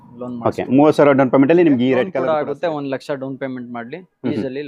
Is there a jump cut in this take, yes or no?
yes